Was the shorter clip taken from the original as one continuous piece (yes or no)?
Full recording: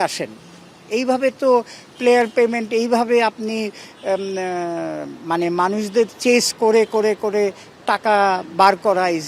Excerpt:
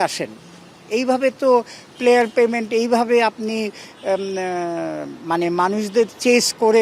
yes